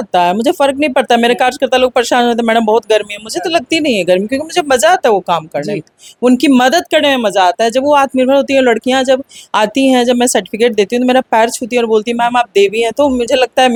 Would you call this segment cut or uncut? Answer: uncut